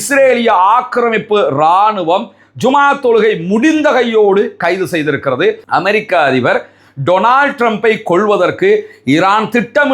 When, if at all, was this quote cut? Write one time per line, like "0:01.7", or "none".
0:05.6